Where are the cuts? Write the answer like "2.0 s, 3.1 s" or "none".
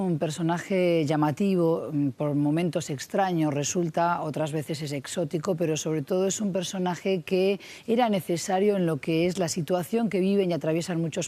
8.1 s